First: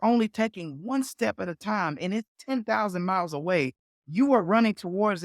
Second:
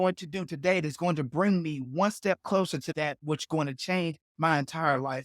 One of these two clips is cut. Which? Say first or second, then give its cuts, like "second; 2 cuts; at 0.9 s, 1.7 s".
second; 1 cut; at 2.9 s